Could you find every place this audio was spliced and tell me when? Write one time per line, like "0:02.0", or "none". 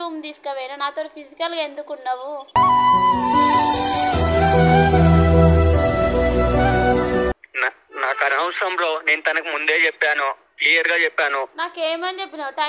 0:07.4